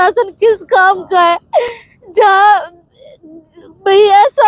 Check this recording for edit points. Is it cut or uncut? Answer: uncut